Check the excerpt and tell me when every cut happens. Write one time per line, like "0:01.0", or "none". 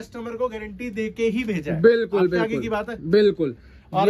none